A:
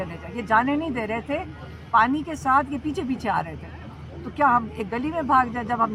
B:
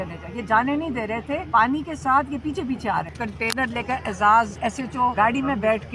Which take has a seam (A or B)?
B